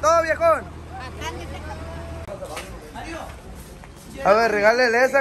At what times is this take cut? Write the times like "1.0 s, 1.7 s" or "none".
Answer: 2.3 s